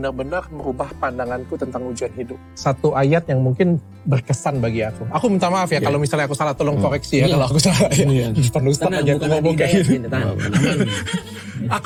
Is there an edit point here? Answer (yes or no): no